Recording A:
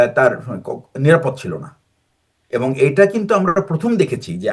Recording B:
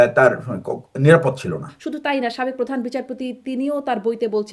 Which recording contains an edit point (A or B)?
B